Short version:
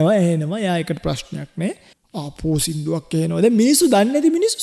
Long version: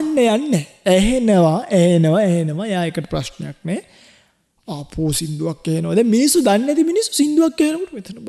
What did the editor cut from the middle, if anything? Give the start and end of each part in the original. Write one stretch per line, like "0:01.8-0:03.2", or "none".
0:04.0-0:04.5